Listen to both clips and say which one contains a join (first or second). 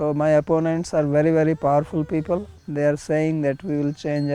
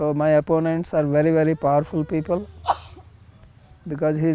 first